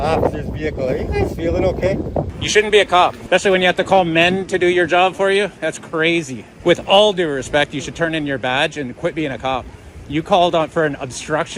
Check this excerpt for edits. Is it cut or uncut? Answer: cut